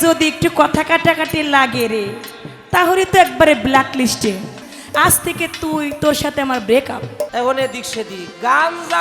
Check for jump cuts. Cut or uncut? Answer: cut